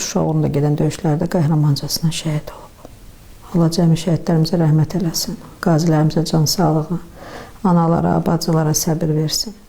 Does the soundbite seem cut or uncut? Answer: uncut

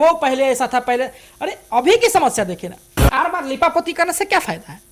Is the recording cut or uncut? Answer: cut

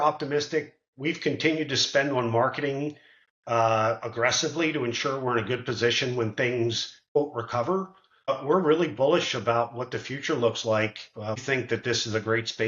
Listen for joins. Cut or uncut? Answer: cut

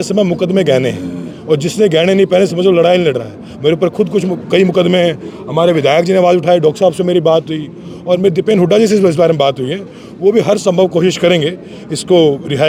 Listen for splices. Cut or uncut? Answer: uncut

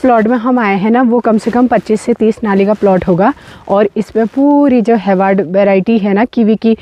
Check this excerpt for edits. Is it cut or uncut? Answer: uncut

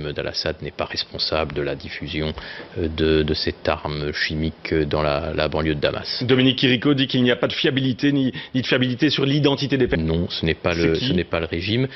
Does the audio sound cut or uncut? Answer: uncut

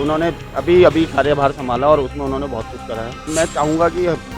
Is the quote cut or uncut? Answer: cut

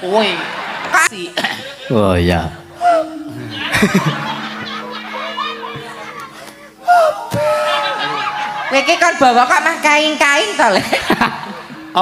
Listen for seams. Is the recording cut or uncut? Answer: cut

